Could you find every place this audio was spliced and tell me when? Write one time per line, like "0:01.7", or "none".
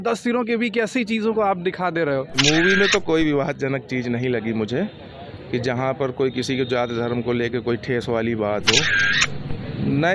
0:02.4